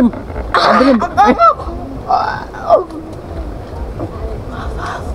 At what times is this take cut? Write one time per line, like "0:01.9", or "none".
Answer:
none